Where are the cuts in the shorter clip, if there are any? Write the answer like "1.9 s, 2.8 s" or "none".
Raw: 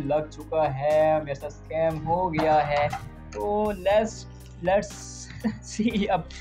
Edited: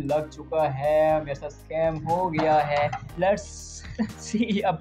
3.0 s